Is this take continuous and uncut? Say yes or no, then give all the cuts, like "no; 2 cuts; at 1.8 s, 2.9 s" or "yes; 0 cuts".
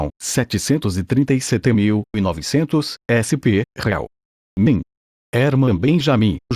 yes; 0 cuts